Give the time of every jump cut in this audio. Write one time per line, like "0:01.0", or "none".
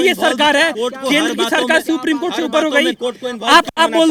none